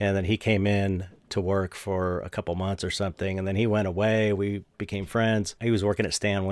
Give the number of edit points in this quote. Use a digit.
1